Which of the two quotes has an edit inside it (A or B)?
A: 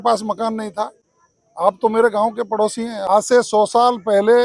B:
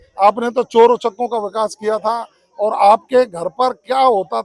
A